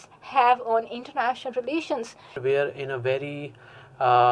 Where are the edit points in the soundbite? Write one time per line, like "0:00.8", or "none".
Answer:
0:02.4